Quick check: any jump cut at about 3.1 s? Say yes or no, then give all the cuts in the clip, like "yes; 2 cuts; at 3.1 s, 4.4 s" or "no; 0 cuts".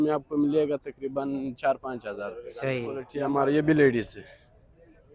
yes; 1 cut; at 3.1 s